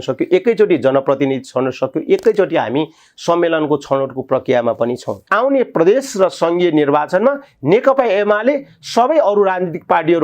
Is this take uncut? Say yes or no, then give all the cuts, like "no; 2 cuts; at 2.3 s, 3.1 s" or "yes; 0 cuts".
no; 1 cut; at 5.2 s